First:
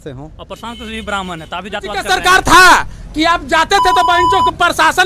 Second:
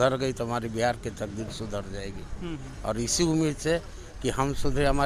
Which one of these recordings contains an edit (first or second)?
first